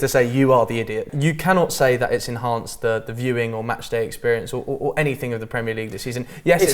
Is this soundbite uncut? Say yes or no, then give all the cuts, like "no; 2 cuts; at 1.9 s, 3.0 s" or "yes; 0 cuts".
no; 1 cut; at 1.0 s